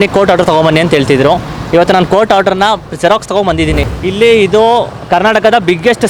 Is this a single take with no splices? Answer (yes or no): no